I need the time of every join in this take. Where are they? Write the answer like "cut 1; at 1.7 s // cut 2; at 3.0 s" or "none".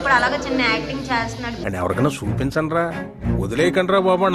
none